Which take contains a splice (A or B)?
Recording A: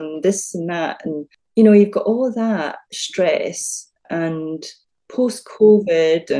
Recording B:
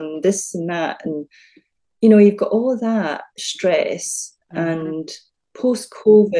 A